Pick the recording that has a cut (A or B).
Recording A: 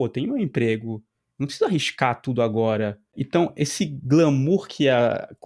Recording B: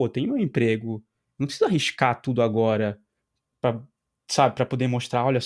A